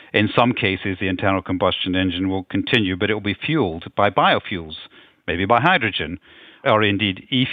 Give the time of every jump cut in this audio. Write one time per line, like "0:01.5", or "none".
0:06.6